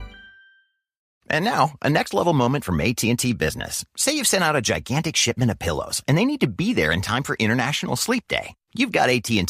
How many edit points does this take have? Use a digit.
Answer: 1